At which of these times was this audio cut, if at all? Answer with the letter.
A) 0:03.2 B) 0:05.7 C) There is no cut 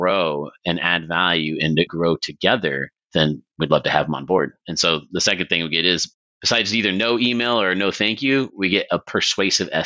A